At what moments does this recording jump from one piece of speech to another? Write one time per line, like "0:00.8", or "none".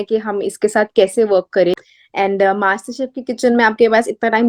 0:01.9